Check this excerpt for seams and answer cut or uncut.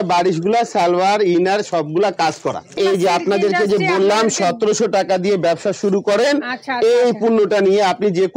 cut